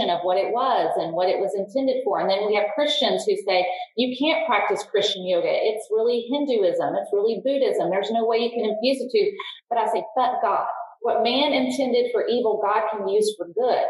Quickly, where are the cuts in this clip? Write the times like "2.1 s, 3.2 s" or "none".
11.0 s